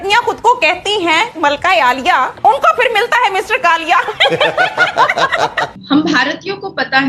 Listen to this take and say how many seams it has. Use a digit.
2